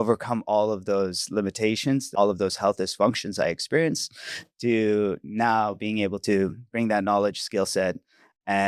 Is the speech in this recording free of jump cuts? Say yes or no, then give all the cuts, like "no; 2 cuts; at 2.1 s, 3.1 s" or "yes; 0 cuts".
no; 1 cut; at 2.1 s